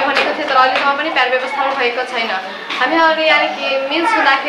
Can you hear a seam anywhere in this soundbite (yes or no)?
no